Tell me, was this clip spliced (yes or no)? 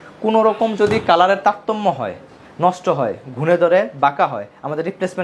no